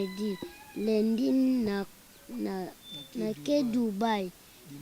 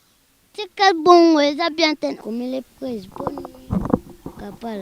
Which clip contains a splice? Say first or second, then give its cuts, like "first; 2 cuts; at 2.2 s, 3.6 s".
second; 1 cut; at 2.2 s